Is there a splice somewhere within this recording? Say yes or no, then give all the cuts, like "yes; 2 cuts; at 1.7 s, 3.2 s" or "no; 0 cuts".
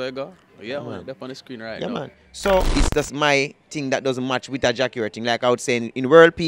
yes; 1 cut; at 2.7 s